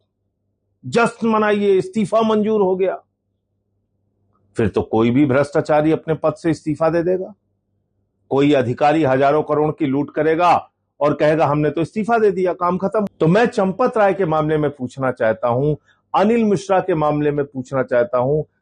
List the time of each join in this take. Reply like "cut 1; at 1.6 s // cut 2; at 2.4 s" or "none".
cut 1; at 13.1 s